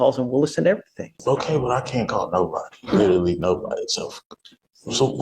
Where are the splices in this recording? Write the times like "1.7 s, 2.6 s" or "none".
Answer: 1.2 s